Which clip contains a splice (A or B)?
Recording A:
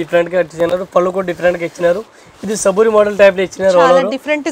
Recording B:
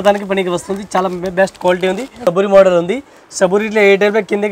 B